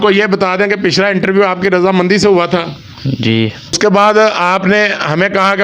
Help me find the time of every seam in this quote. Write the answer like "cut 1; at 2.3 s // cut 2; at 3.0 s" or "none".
cut 1; at 3.8 s